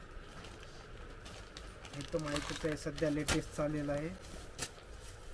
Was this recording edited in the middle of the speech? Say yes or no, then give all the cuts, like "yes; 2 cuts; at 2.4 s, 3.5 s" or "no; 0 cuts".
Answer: no; 0 cuts